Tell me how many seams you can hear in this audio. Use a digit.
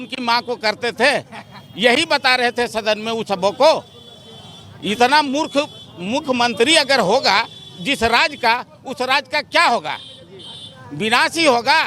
0